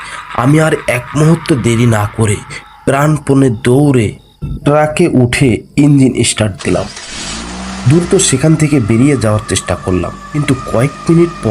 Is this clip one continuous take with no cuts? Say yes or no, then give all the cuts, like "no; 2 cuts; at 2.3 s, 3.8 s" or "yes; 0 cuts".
no; 1 cut; at 10.2 s